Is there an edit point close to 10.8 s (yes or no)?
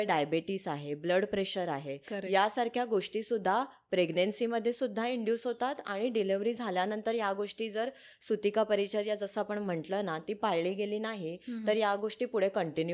no